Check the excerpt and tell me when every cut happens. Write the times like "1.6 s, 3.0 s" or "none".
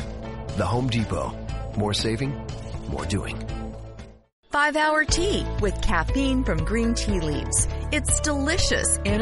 none